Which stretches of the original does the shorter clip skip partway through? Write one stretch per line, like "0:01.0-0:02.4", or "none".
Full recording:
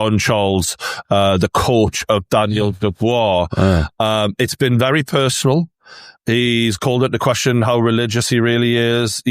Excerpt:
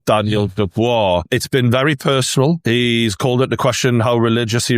0:03.5-0:04.3
0:05.7-0:06.2